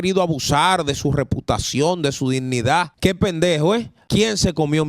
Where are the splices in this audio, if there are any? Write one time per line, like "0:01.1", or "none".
0:02.9
0:04.0